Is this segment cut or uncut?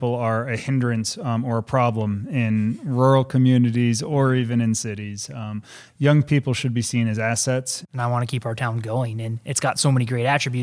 cut